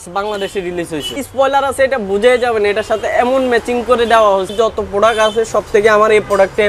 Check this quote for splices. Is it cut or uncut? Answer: cut